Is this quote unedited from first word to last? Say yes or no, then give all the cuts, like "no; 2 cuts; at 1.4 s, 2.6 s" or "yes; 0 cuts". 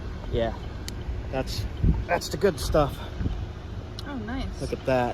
no; 1 cut; at 2.0 s